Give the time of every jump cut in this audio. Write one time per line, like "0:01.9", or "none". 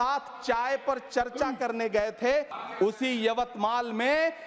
0:02.6